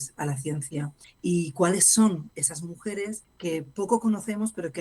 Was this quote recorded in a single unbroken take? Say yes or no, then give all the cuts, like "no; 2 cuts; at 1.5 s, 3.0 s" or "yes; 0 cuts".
no; 2 cuts; at 1.0 s, 3.3 s